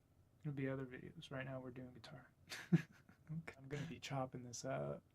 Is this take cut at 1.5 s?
no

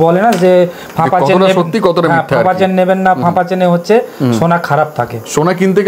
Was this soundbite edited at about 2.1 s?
no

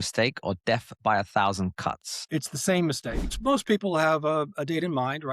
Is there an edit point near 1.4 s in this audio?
no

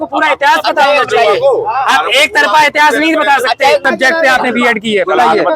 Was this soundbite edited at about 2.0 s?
no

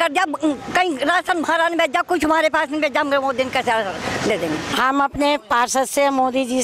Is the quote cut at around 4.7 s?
yes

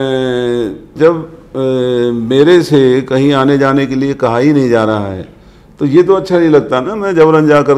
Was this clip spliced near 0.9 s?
yes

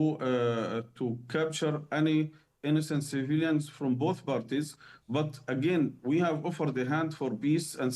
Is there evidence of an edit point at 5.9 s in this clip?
yes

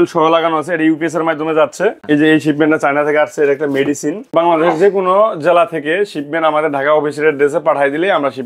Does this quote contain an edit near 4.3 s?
yes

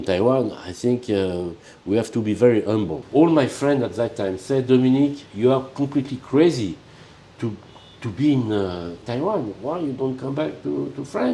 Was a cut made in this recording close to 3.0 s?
yes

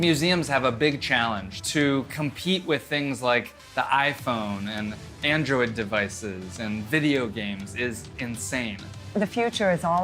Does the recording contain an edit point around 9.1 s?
yes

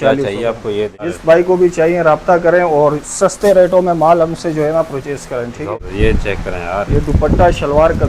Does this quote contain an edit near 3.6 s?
no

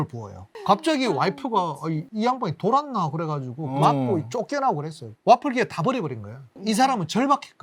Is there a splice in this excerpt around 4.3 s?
no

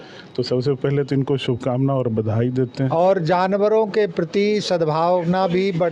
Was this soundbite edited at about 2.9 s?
yes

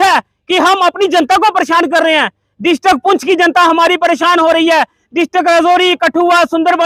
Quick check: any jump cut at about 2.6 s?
no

